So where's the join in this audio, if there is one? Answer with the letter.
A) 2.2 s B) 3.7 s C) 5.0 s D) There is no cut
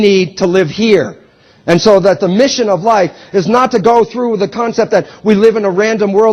B